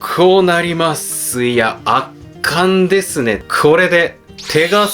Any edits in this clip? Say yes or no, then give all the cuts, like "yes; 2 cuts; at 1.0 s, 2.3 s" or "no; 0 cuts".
yes; 1 cut; at 3.5 s